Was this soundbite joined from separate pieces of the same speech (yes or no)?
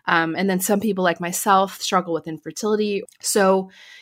yes